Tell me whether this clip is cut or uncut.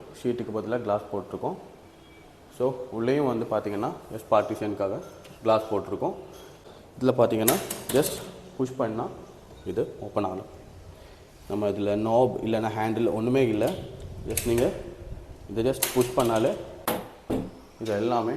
cut